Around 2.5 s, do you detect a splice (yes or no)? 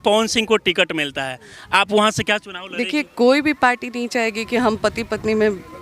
no